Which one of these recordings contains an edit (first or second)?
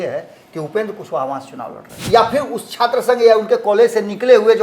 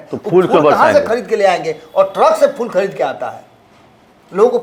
first